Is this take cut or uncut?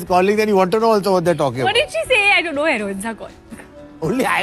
uncut